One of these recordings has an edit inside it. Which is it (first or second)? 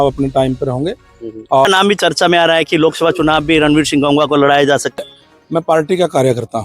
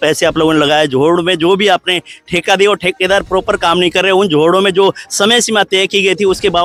first